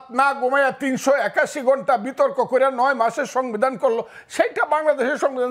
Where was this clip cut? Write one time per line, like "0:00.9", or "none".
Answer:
none